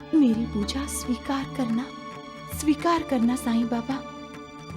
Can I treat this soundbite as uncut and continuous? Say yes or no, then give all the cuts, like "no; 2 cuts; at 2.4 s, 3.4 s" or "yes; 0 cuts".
yes; 0 cuts